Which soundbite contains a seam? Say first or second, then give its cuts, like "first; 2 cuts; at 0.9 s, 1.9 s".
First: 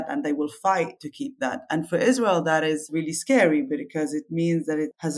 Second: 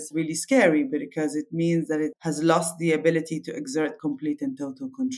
first; 1 cut; at 1.0 s